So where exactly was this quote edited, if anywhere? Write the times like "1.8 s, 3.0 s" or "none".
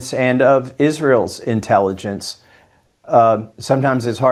none